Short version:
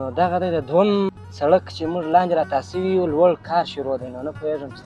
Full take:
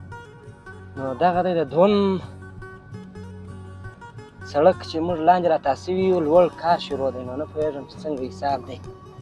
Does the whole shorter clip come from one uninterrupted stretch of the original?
no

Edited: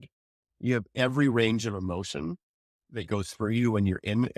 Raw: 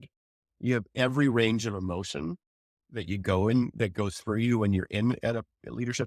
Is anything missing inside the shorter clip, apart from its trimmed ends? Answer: yes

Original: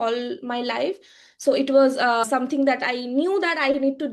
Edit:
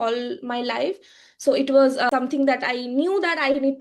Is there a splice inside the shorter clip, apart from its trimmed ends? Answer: yes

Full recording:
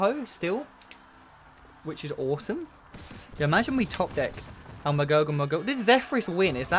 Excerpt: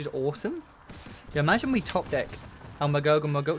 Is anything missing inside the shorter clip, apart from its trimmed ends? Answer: no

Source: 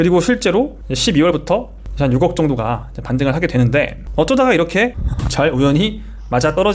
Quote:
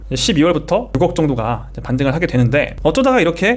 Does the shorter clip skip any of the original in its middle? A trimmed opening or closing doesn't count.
yes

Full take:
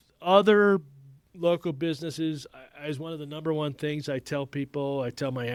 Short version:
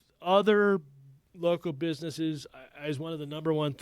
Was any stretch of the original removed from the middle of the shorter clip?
no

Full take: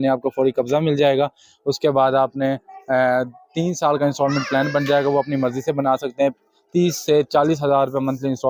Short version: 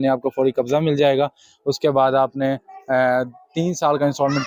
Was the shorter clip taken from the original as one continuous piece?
yes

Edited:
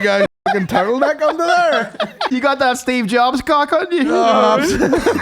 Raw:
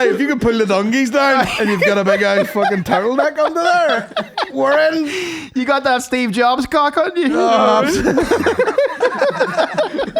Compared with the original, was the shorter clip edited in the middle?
yes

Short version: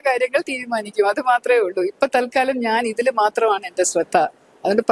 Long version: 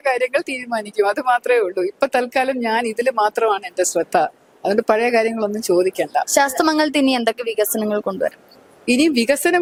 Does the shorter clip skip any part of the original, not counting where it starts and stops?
no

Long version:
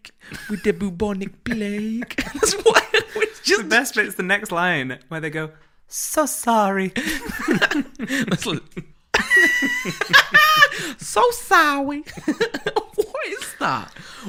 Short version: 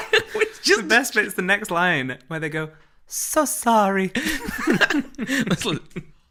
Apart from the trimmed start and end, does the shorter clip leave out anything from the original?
no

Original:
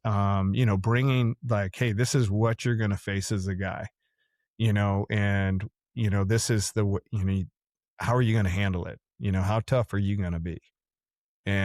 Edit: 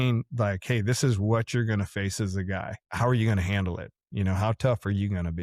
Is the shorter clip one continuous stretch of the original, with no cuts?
no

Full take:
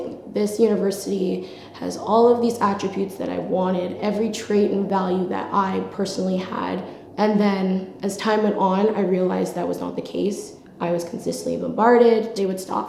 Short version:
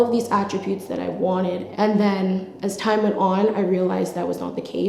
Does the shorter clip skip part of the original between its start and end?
yes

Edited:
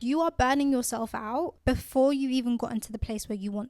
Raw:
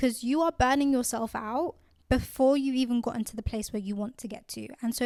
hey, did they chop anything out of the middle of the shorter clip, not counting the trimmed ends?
yes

